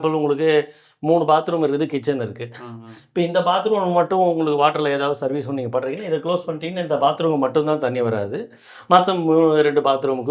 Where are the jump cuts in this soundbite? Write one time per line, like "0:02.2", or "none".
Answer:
none